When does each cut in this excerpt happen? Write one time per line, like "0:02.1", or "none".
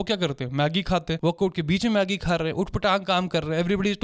none